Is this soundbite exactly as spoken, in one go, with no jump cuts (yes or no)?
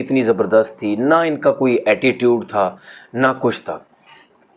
yes